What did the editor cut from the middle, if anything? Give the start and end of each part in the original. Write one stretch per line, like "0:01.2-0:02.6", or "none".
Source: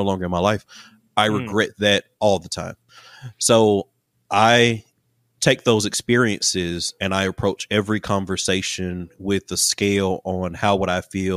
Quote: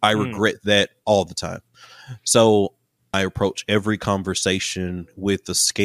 0:04.1-0:07.0